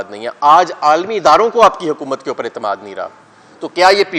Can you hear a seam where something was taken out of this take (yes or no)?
no